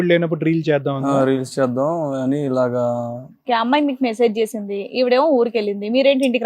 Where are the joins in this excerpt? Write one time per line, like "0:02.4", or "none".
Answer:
0:03.4